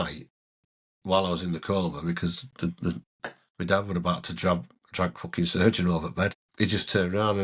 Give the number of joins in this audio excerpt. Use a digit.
1